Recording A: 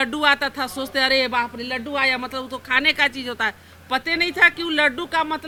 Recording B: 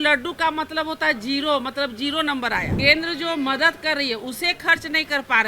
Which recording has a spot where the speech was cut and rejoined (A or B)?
B